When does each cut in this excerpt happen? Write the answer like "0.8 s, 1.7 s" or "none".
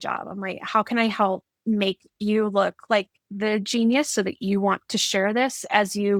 none